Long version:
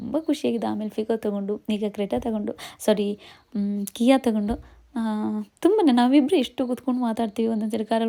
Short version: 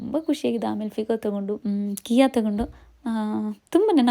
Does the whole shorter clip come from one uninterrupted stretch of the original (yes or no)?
no